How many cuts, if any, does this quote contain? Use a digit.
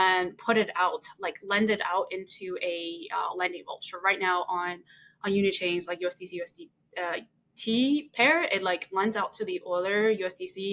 0